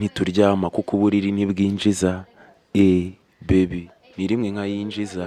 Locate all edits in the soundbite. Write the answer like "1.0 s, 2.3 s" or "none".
none